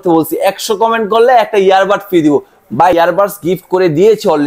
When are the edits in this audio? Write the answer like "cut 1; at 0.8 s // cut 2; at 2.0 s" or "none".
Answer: cut 1; at 2.9 s